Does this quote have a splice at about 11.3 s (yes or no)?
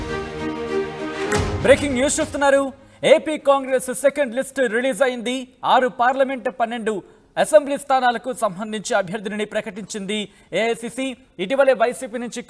no